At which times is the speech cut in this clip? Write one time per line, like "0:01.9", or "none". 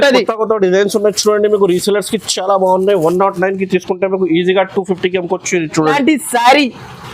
0:06.0